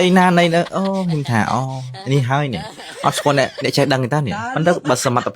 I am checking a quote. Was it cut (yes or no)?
yes